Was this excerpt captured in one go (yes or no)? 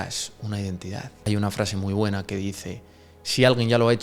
no